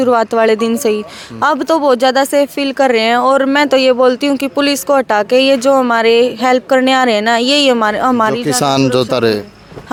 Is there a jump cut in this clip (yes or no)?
no